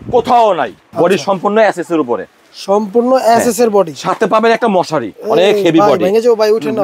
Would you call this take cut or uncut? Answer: cut